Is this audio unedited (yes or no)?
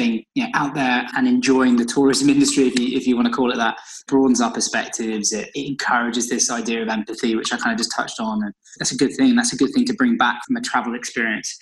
no